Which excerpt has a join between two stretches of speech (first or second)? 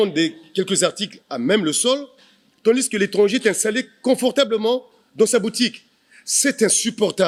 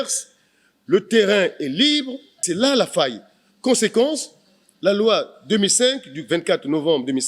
second